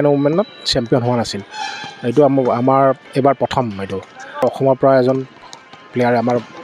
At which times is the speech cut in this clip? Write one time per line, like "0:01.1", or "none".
0:04.4